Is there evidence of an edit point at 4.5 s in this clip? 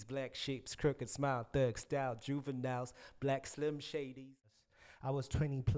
yes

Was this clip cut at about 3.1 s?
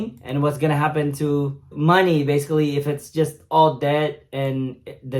no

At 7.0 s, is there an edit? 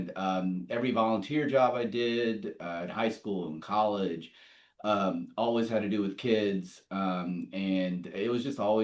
no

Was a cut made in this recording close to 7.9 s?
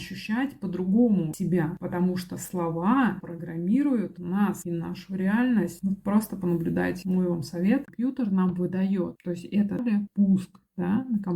yes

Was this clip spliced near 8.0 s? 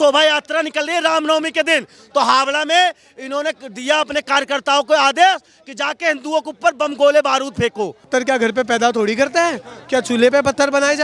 yes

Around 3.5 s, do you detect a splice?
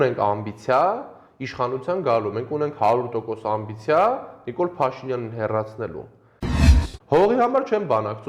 no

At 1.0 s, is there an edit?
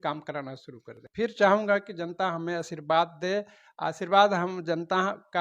yes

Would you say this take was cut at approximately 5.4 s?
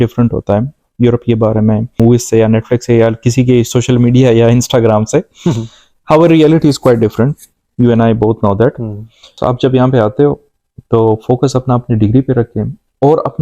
no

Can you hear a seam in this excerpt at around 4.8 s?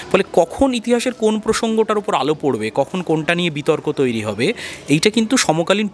no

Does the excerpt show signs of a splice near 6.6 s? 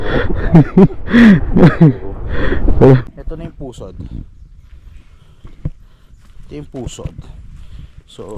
no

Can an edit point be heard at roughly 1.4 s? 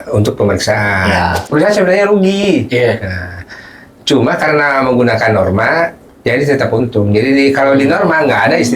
yes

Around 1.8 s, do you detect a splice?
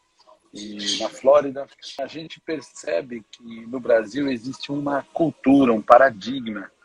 yes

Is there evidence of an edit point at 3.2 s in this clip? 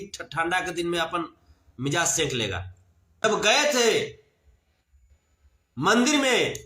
yes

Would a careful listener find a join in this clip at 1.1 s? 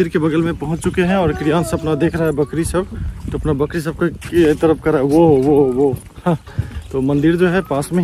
no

